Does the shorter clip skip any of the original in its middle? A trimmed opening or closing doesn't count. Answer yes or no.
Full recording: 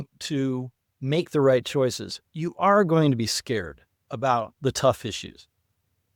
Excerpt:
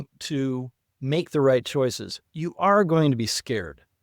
no